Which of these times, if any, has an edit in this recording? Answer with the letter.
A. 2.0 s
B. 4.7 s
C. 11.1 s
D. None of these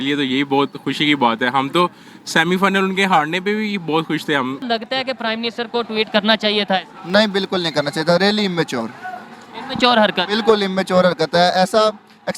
B